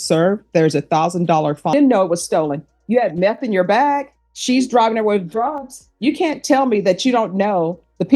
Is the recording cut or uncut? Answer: cut